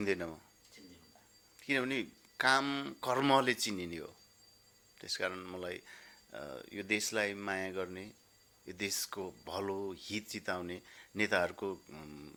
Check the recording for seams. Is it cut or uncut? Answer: uncut